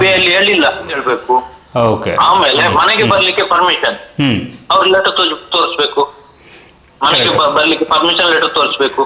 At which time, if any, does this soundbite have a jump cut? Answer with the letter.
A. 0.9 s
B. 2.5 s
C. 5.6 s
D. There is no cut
A